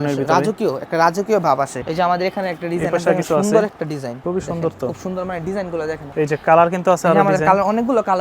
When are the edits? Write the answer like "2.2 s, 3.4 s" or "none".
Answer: 1.8 s, 4.1 s